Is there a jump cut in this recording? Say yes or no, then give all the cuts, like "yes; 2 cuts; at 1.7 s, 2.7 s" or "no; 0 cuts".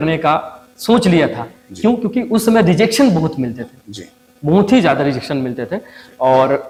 no; 0 cuts